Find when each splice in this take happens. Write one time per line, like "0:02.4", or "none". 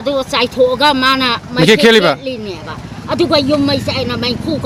none